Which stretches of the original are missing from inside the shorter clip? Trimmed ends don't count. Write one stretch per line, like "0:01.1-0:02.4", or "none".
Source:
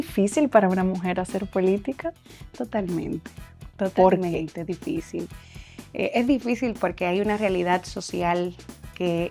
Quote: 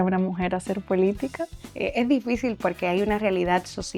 0:02.3-0:05.8